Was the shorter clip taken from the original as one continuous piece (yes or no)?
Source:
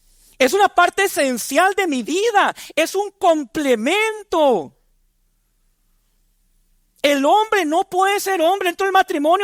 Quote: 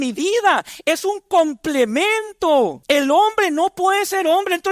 no